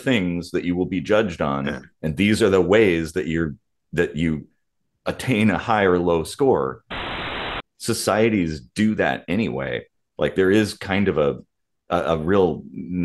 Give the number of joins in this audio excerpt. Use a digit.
1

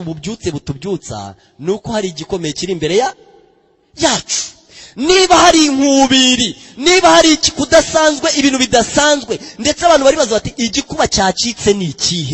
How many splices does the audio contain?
0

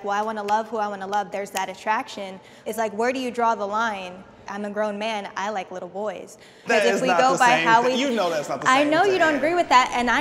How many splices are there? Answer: 3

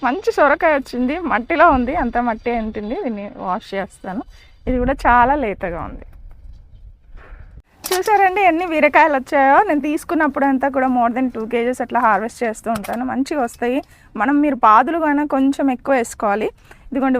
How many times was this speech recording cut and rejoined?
1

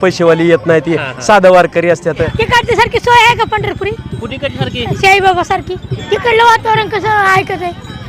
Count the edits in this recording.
2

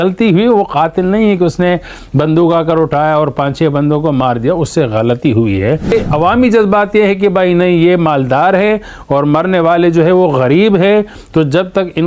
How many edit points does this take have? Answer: 1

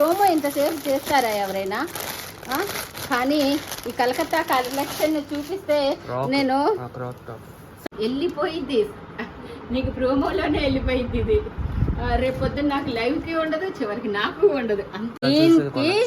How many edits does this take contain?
2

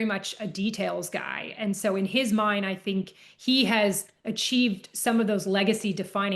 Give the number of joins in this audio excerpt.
0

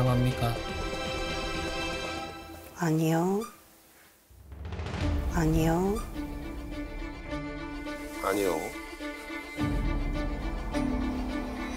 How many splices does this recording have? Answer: 0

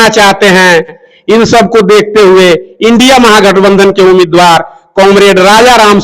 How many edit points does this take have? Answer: 1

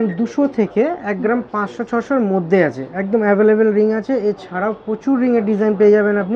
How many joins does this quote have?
0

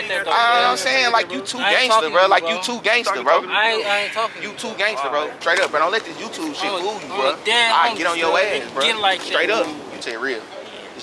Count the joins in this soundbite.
2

